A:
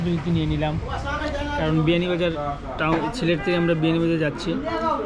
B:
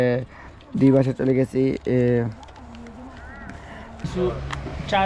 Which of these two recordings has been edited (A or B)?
B